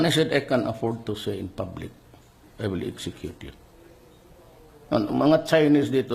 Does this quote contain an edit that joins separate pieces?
no; 0 cuts

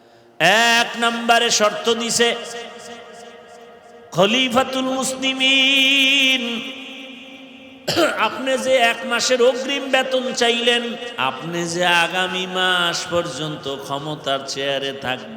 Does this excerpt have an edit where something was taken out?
yes; 1 cut; at 11.1 s

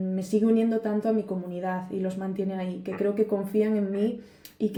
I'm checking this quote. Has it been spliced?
no; 0 cuts

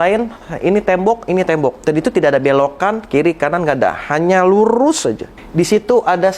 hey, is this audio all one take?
no; 2 cuts; at 1.8 s, 5.3 s

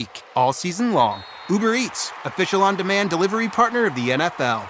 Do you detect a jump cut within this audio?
no; 0 cuts

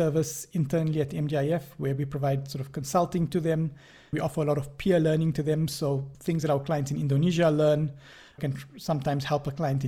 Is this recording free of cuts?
no; 3 cuts; at 4.2 s, 6.1 s, 8.4 s

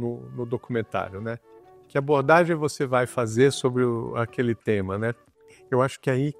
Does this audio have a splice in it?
no; 0 cuts

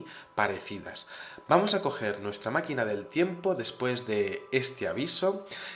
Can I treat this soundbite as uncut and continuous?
no; 1 cut; at 3.7 s

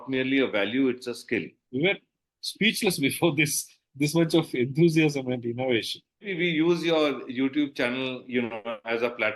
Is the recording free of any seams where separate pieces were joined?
no; 2 cuts; at 1.6 s, 6.3 s

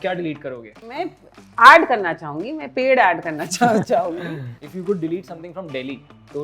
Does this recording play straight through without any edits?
no; 2 cuts; at 0.9 s, 4.6 s

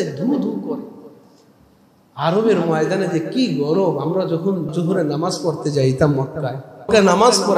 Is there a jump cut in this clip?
yes; 2 cuts; at 4.7 s, 6.9 s

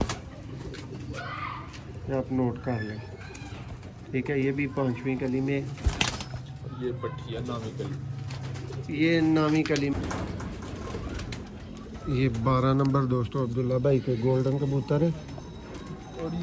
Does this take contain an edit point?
yes; 1 cut; at 9.9 s

